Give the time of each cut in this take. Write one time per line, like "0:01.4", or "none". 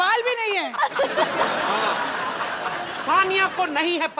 0:02.9